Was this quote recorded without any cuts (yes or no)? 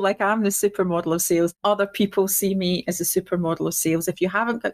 no